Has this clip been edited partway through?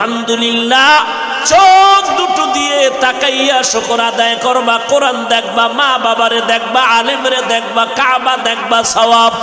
no; 0 cuts

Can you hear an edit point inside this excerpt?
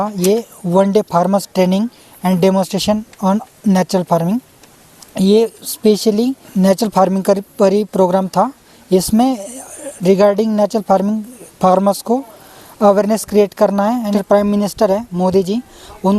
yes; 2 cuts; at 6.4 s, 14.1 s

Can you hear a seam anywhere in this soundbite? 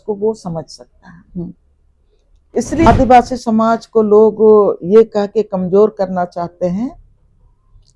yes; 1 cut; at 2.9 s

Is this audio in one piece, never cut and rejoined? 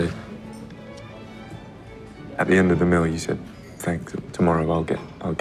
yes; 0 cuts

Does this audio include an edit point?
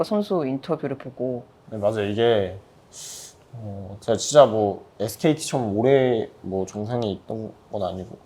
yes; 1 cut; at 1.6 s

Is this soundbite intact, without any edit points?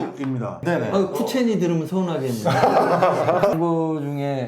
no; 1 cut; at 3.5 s

